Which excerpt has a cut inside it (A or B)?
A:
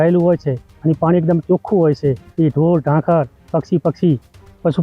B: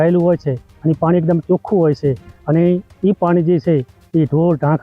A